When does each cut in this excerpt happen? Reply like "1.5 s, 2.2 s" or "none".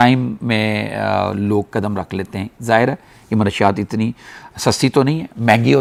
none